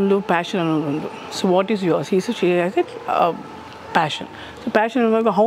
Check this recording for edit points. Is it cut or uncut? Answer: uncut